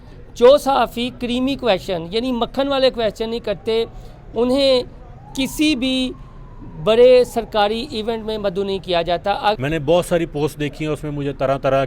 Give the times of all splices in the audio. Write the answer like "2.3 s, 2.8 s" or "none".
9.6 s